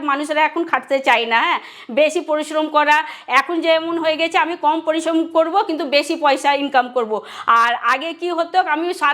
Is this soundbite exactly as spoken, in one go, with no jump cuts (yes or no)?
yes